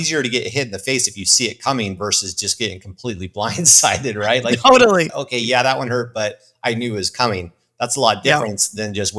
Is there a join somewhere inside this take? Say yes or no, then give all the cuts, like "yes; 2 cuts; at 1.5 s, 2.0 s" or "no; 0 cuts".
yes; 1 cut; at 5.1 s